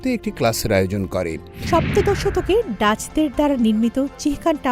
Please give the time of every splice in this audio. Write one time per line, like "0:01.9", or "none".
0:01.5